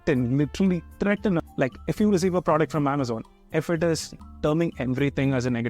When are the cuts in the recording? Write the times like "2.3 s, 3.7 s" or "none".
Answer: 1.4 s, 4.3 s